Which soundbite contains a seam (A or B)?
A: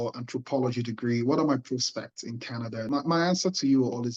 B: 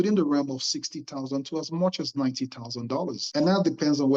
A